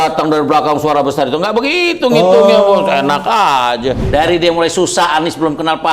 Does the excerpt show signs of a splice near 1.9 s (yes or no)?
no